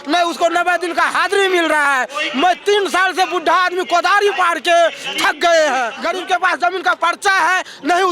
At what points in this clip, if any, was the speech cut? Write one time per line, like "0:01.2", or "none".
0:06.0